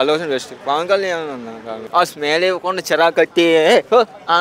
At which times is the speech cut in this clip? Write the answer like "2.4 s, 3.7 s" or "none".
1.7 s